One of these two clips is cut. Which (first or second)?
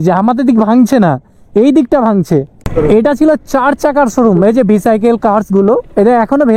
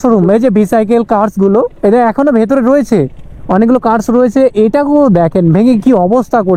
first